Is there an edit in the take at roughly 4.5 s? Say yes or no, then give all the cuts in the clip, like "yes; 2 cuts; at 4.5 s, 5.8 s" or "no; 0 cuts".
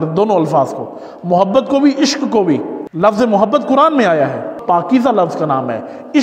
yes; 2 cuts; at 2.8 s, 4.5 s